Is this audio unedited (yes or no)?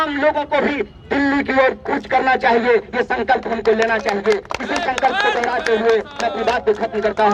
yes